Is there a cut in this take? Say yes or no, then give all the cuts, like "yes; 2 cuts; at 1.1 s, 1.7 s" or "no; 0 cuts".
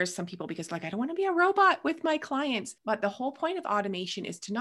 yes; 1 cut; at 2.7 s